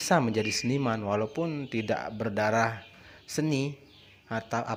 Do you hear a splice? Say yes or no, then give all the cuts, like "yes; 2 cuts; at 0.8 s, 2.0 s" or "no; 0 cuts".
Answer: no; 0 cuts